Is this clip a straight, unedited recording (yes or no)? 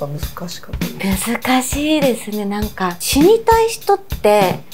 yes